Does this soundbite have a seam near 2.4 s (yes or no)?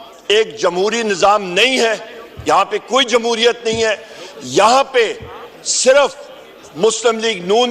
no